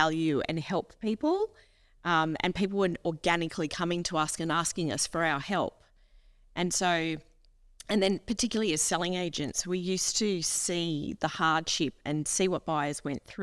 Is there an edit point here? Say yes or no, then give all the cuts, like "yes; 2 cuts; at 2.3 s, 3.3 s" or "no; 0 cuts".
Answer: no; 0 cuts